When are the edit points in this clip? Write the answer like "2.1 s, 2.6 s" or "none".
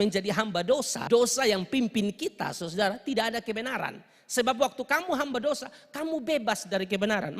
1.0 s